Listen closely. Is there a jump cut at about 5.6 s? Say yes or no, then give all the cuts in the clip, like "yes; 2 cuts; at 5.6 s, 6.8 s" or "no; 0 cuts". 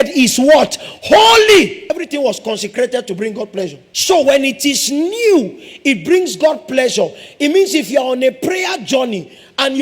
no; 2 cuts; at 1.8 s, 3.9 s